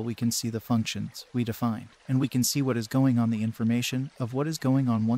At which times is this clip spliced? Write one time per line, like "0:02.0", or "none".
none